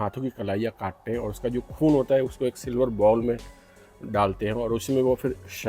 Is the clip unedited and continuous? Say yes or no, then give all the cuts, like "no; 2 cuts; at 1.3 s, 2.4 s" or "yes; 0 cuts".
yes; 0 cuts